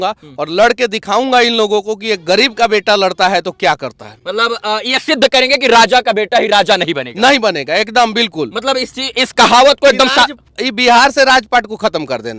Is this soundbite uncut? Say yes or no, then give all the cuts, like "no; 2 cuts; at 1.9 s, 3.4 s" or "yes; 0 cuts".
yes; 0 cuts